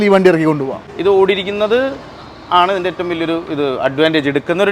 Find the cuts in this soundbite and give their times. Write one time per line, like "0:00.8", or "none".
0:01.0